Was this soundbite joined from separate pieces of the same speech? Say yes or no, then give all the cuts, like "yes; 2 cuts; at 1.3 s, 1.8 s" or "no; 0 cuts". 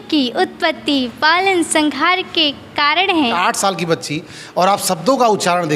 yes; 1 cut; at 3.3 s